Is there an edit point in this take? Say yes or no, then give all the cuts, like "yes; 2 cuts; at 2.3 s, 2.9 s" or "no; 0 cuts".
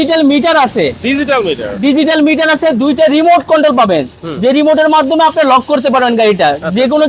no; 0 cuts